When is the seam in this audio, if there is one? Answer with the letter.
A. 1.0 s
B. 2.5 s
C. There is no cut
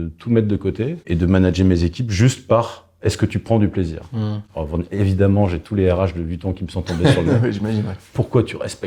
A